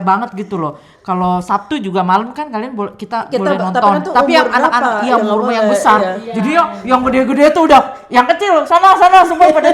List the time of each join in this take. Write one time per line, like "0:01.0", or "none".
none